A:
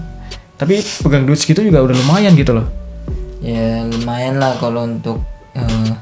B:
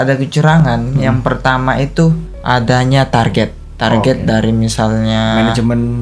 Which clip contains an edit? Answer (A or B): B